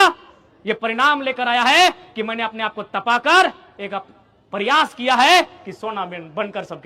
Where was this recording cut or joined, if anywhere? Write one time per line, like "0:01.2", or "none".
none